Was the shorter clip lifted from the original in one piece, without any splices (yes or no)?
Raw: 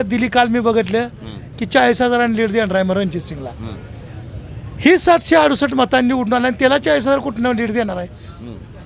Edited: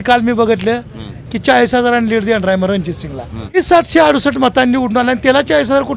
no